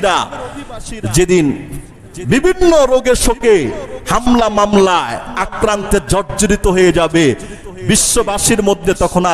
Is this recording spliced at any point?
no; 0 cuts

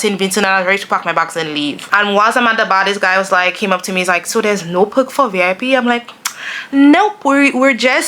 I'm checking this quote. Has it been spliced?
yes; 1 cut; at 1.8 s

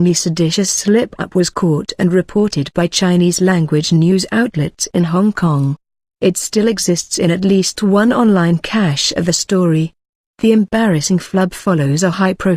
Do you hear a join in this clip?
yes; 1 cut; at 11.0 s

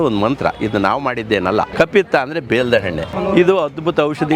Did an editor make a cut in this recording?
yes; 2 cuts; at 1.7 s, 3.3 s

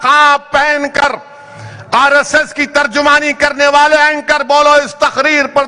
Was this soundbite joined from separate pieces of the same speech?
no; 0 cuts

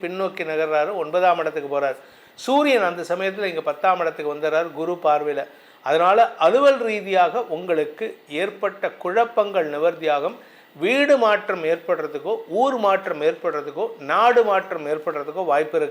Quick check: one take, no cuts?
yes; 0 cuts

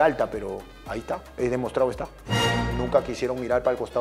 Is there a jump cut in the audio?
yes; 1 cut; at 1.3 s

